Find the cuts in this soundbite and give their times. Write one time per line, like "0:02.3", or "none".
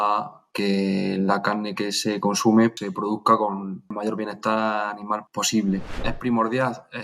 0:02.8
0:03.9
0:05.3
0:06.1